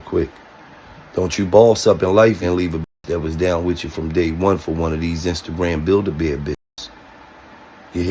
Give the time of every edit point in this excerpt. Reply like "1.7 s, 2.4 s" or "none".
2.4 s